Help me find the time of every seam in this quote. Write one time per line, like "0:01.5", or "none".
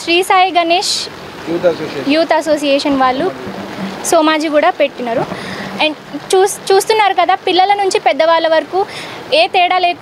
none